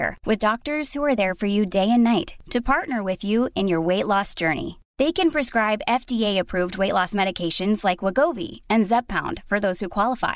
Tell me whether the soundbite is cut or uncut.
uncut